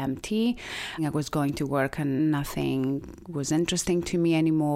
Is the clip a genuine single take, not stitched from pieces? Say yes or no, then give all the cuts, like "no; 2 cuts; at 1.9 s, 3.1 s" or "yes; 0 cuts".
no; 2 cuts; at 1.0 s, 2.2 s